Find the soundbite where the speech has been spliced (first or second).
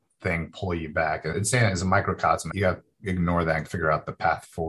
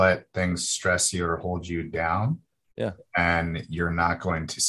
first